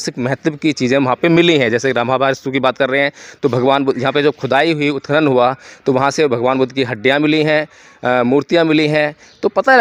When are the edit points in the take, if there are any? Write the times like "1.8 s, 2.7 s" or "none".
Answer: none